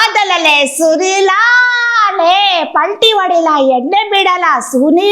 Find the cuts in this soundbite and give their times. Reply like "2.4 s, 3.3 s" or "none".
none